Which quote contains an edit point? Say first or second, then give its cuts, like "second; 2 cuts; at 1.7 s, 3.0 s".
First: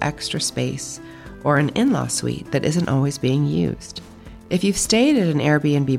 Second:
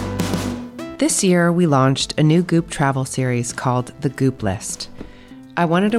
second; 1 cut; at 0.9 s